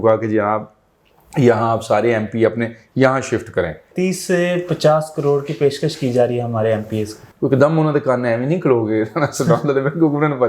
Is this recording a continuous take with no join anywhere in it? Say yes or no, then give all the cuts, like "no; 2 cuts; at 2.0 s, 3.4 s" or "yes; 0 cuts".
no; 2 cuts; at 3.8 s, 7.3 s